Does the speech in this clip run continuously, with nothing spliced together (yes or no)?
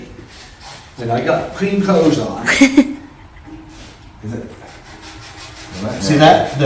yes